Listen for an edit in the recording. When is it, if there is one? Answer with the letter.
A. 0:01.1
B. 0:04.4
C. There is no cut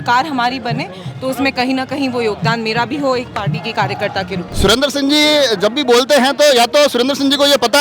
B